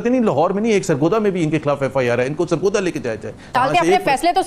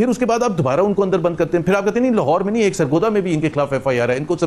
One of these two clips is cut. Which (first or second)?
first